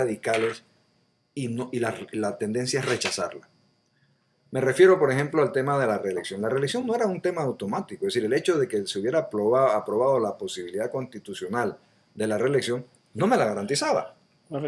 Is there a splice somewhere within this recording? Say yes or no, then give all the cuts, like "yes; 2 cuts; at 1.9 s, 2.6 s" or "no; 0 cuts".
no; 0 cuts